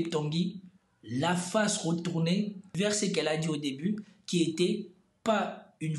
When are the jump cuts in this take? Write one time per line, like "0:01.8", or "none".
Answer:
0:03.0

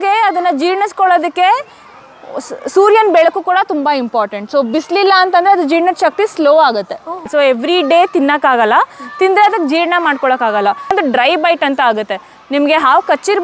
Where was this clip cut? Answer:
0:07.2
0:10.9

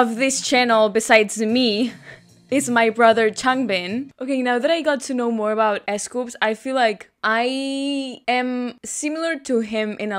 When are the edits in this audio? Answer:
0:04.1

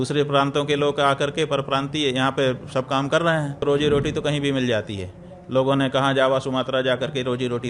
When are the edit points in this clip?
0:03.6

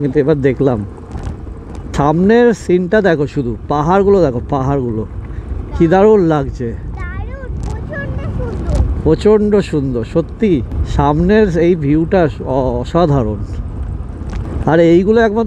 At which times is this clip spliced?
0:01.8
0:10.8
0:14.5

